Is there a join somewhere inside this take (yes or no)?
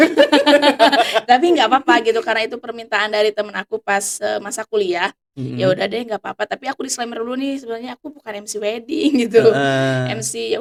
no